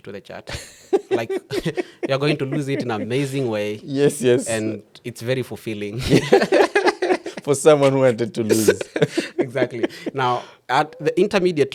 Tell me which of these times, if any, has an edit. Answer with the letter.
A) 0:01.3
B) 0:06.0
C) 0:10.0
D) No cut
D